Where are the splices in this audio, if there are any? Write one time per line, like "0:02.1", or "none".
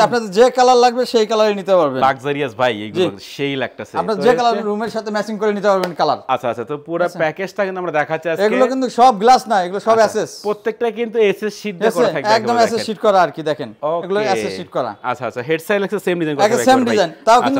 none

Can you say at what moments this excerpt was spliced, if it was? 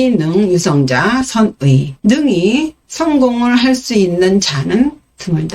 0:01.9

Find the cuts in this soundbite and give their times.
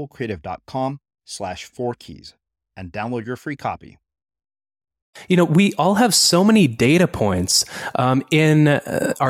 0:05.1

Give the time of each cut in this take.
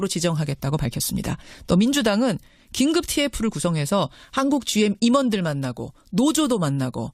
0:04.7

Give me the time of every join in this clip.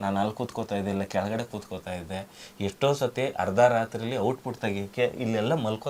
none

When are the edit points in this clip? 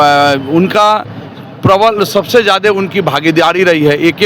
none

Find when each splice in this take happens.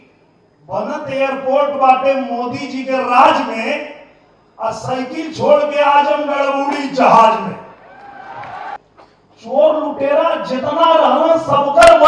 0:08.8

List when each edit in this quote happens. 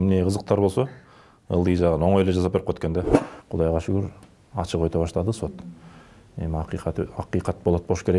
0:03.2

